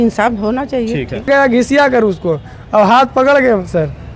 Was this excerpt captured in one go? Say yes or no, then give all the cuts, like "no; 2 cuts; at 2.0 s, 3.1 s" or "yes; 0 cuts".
no; 1 cut; at 1.3 s